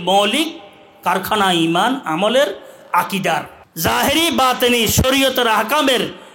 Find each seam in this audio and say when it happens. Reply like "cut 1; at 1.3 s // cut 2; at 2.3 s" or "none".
cut 1; at 3.6 s